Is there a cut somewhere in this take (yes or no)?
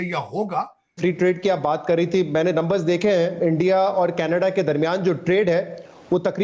yes